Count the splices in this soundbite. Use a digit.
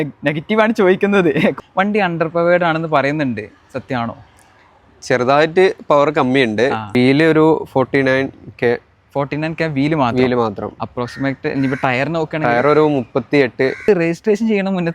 3